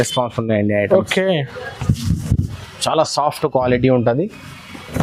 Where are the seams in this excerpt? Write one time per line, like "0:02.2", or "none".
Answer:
none